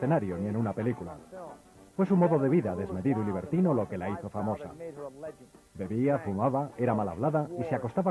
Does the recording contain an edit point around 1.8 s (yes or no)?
yes